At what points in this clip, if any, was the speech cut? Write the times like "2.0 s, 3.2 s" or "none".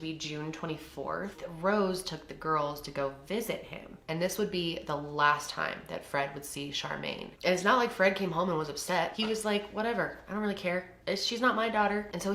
1.4 s, 7.3 s, 9.1 s, 10.9 s